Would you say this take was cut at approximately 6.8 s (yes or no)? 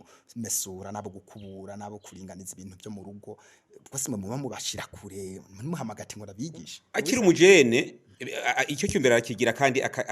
yes